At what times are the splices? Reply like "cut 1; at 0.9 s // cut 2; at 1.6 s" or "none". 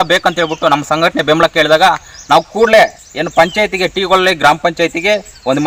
none